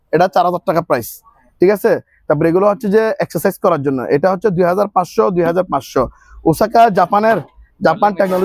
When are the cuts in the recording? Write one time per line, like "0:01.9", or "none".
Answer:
none